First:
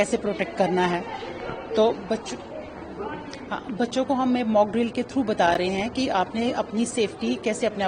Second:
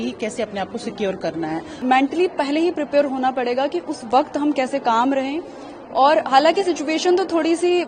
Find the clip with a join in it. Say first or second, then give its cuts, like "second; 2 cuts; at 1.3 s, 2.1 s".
second; 1 cut; at 1.7 s